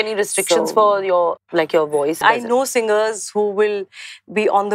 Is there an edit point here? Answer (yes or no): yes